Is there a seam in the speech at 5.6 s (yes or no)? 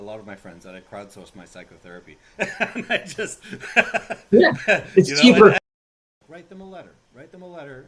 yes